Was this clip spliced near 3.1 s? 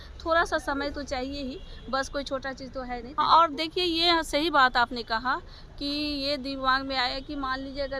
yes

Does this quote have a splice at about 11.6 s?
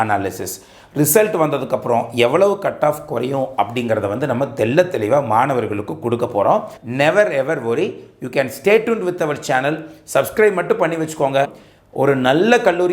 yes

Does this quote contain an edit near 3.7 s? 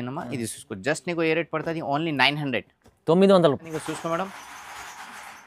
yes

